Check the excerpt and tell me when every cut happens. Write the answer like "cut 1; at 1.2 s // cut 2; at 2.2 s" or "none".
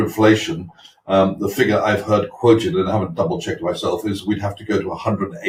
none

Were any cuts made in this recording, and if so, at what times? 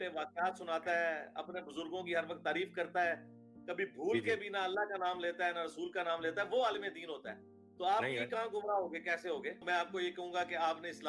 cut 1; at 9.6 s

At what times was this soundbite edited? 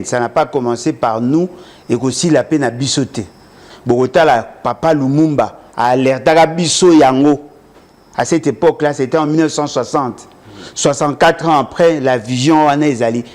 cut 1; at 3.7 s

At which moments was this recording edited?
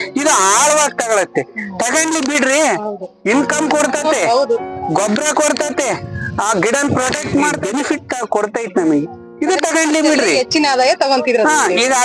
cut 1; at 7.6 s

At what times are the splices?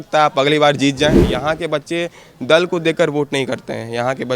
cut 1; at 1.3 s

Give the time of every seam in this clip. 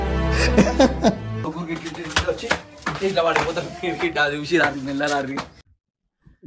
cut 1; at 1.5 s

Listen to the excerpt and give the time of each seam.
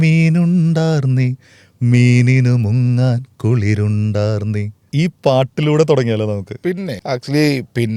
cut 1; at 4.8 s // cut 2; at 6.9 s

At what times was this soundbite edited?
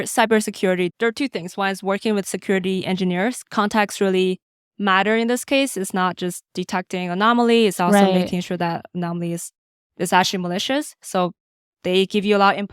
cut 1; at 0.9 s // cut 2; at 3.4 s

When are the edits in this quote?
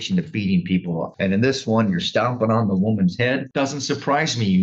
cut 1; at 1.1 s // cut 2; at 3.5 s

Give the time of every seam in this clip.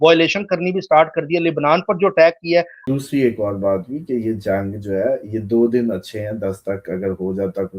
cut 1; at 2.8 s

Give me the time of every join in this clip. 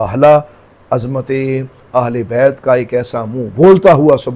none

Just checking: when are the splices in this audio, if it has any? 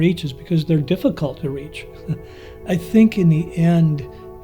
cut 1; at 2.6 s

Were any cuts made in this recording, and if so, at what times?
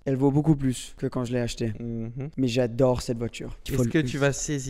cut 1; at 0.9 s // cut 2; at 2.2 s // cut 3; at 3.6 s

